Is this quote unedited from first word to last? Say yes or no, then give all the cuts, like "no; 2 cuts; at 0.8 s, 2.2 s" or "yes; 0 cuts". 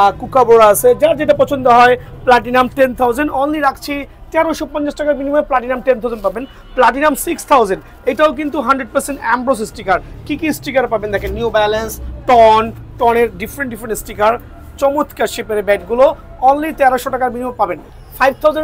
yes; 0 cuts